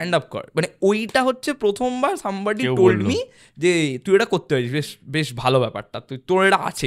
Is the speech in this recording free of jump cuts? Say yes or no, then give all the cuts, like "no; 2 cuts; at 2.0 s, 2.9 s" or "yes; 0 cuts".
yes; 0 cuts